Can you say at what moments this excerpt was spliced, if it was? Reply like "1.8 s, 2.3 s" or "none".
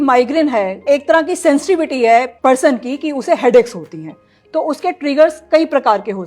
0.8 s, 2.3 s